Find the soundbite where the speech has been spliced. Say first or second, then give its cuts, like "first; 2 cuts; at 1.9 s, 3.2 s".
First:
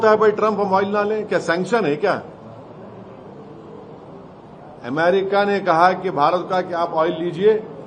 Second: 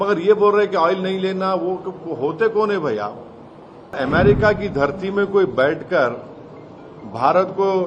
second; 1 cut; at 4.0 s